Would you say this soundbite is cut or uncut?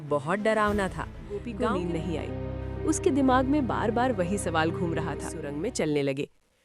cut